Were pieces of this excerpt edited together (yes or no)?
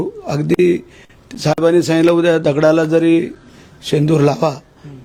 no